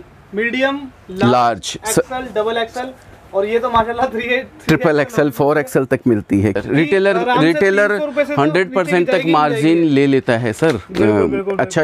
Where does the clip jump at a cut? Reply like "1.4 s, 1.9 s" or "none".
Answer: 6.6 s